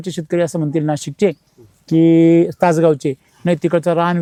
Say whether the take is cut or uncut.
uncut